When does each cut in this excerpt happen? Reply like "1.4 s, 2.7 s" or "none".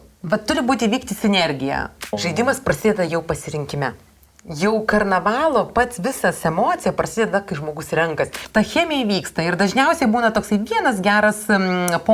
2.2 s, 8.4 s